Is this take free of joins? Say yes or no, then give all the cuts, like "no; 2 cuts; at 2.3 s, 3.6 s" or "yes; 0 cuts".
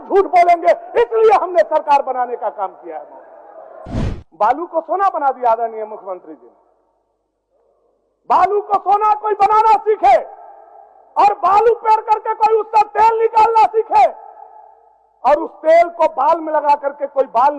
no; 1 cut; at 4.0 s